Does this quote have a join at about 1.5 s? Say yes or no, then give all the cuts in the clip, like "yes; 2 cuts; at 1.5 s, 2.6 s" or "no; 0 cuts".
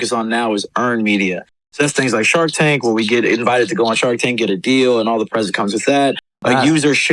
no; 0 cuts